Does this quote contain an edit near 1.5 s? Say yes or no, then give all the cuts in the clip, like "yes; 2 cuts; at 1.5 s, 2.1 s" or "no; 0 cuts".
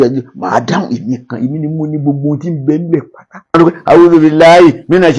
no; 1 cut; at 3.5 s